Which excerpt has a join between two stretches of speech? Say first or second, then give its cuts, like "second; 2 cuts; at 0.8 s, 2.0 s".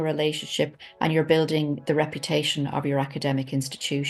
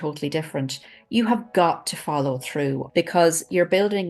second; 1 cut; at 2.8 s